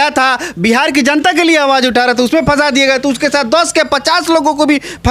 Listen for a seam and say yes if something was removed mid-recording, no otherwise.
no